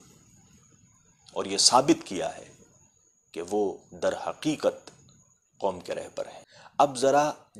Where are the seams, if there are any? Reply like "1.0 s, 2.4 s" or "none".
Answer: 6.4 s